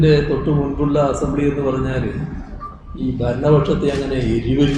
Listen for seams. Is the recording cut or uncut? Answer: uncut